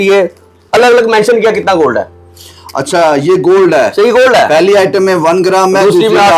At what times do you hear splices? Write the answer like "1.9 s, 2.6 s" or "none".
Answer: none